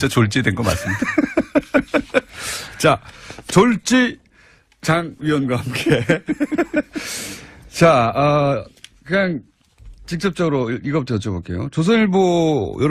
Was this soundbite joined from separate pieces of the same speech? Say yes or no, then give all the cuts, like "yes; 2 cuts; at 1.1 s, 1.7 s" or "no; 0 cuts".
no; 0 cuts